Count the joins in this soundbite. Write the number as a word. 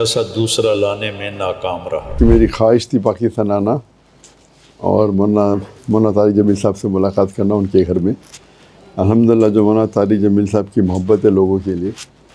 one